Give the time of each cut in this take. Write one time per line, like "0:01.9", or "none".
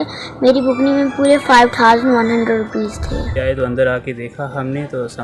0:03.3